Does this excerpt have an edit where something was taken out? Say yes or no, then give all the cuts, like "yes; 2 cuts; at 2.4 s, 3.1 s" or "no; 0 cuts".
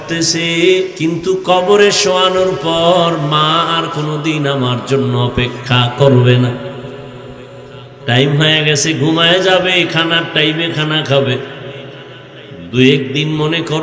yes; 1 cut; at 0.9 s